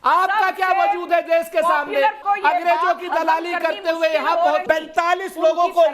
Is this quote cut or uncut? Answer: cut